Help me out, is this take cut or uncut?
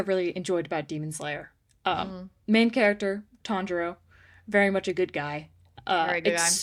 uncut